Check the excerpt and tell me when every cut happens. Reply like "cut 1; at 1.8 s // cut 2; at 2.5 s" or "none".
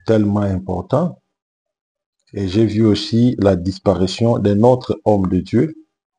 none